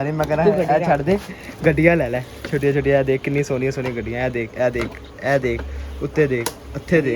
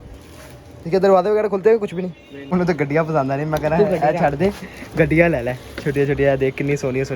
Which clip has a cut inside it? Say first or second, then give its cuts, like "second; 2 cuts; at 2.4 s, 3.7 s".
second; 1 cut; at 2.3 s